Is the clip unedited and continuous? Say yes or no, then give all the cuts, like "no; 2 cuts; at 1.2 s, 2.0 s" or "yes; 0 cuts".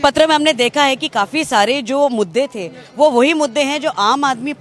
yes; 0 cuts